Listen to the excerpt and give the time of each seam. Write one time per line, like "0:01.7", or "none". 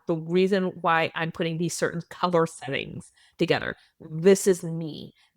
none